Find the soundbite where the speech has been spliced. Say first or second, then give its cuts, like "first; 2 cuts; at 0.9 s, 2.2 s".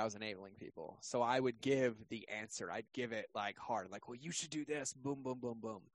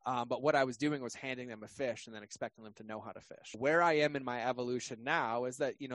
second; 1 cut; at 3.6 s